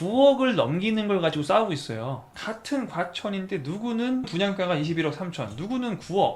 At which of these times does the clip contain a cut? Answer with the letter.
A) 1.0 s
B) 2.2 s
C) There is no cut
B